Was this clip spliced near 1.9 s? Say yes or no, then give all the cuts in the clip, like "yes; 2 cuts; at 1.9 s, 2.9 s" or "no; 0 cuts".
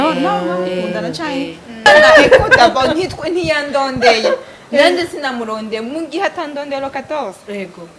yes; 1 cut; at 1.9 s